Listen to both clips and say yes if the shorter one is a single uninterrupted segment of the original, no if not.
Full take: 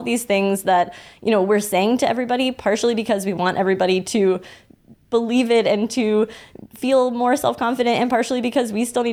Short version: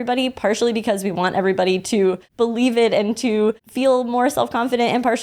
no